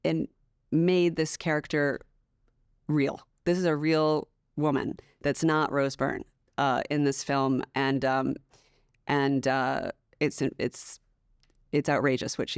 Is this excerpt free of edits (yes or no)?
yes